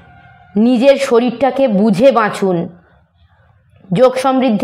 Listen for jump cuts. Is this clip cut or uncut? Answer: uncut